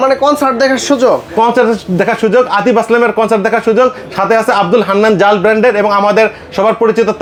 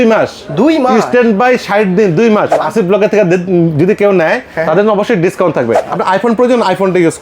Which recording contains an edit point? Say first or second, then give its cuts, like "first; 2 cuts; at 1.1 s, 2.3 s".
second; 2 cuts; at 2.6 s, 5.9 s